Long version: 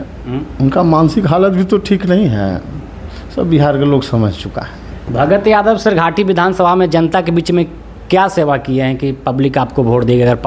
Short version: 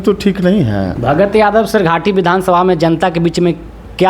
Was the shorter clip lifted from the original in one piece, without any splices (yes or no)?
no